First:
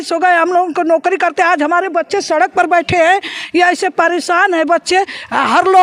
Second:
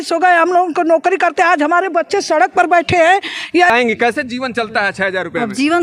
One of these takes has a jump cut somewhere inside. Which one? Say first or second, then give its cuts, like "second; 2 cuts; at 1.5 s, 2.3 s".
second; 1 cut; at 3.7 s